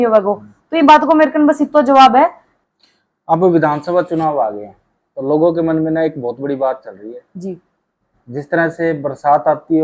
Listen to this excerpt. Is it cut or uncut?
cut